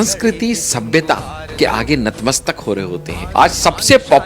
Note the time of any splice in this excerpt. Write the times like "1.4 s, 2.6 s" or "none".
3.2 s